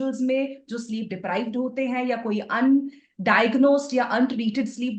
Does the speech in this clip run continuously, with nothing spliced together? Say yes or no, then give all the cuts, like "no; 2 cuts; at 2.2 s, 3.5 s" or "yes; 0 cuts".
yes; 0 cuts